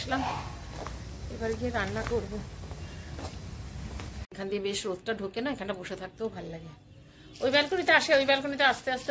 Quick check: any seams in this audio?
yes; 1 cut; at 4.3 s

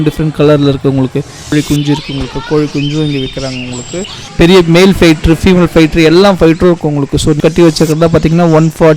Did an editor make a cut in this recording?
yes; 3 cuts; at 1.4 s, 4.2 s, 7.4 s

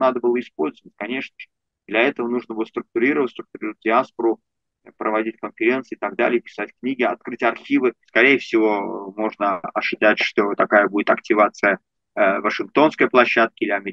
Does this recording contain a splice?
yes; 1 cut; at 8.0 s

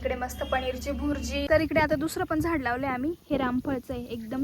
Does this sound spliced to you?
yes; 1 cut; at 1.5 s

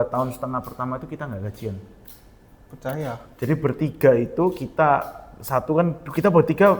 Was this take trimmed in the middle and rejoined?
no; 0 cuts

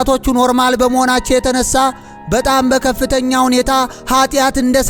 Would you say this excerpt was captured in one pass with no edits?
yes; 0 cuts

